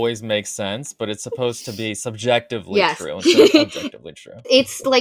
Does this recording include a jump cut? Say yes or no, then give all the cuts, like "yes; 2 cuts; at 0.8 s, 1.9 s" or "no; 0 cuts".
no; 0 cuts